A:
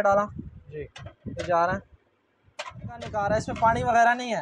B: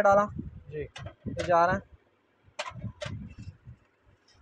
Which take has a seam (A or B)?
A